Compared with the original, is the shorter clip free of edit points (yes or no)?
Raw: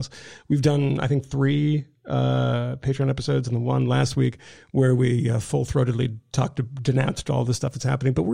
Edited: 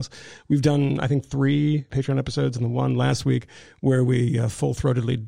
no